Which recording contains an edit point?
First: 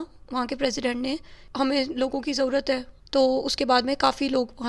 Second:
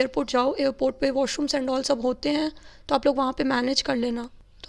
first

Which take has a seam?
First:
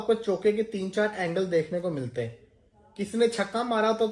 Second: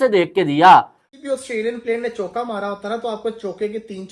second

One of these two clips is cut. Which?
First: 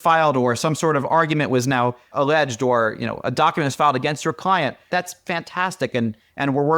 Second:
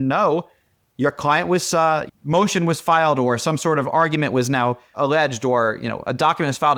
first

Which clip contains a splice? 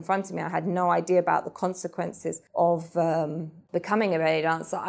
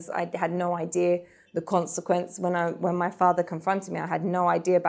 first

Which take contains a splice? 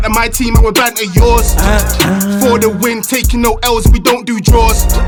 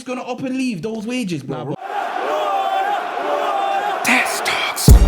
second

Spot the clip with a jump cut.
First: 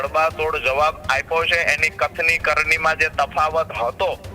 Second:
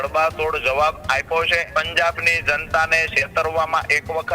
second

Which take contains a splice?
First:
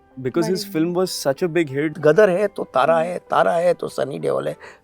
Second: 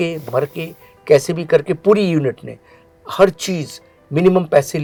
first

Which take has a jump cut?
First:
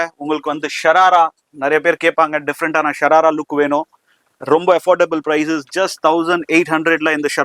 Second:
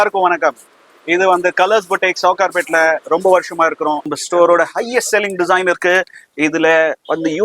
second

